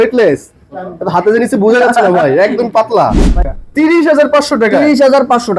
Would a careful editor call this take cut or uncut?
cut